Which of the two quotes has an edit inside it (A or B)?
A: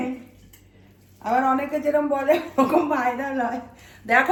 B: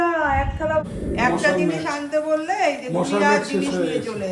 B